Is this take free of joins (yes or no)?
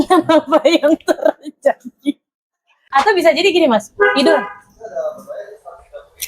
no